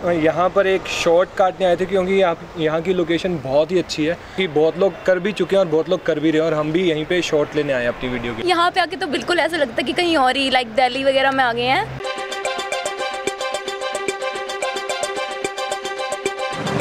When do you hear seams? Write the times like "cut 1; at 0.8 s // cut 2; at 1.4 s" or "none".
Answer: cut 1; at 4.4 s // cut 2; at 8.4 s // cut 3; at 12.1 s